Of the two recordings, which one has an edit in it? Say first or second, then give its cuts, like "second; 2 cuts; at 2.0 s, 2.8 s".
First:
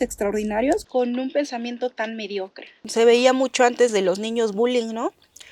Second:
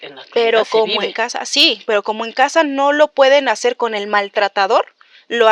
first; 1 cut; at 2.8 s